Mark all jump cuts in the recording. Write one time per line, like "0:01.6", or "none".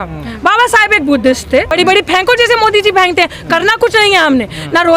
0:01.7

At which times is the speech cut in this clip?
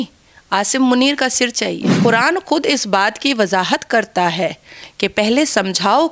0:01.9

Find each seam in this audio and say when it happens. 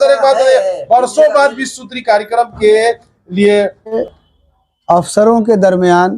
0:04.0

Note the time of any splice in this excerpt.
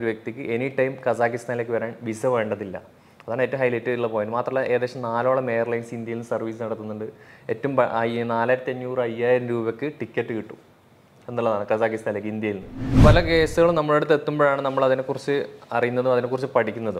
0:12.8

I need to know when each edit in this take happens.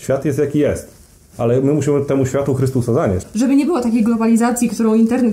0:03.3

